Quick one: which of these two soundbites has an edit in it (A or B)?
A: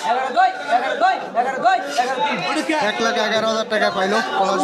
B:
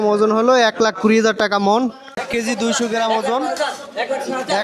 B